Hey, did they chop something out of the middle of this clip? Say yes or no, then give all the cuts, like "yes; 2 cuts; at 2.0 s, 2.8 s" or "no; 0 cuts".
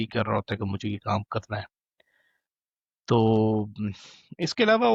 no; 0 cuts